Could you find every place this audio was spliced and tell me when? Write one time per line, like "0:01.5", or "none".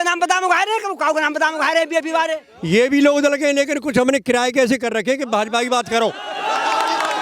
0:02.5